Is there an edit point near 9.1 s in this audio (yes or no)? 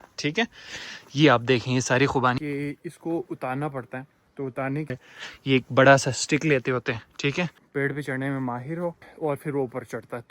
yes